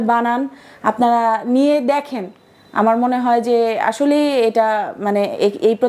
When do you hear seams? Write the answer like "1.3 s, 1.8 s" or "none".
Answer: none